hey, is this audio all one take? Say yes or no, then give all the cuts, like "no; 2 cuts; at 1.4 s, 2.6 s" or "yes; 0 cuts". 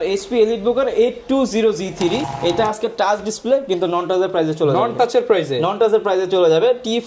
no; 1 cut; at 2.3 s